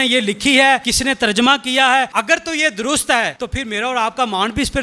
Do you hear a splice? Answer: yes; 3 cuts; at 0.9 s, 2.1 s, 3.4 s

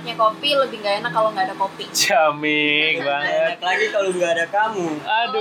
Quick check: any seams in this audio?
no; 0 cuts

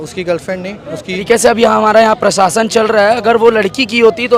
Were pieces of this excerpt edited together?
yes; 1 cut; at 1.2 s

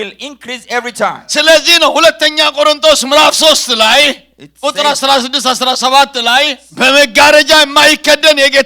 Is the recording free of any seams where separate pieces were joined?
no; 1 cut; at 6.6 s

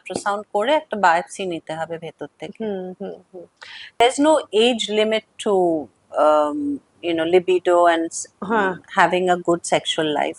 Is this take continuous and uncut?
no; 1 cut; at 3.9 s

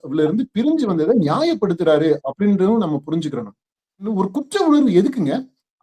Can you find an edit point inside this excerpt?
yes; 1 cut; at 4.1 s

